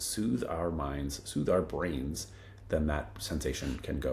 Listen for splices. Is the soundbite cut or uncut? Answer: uncut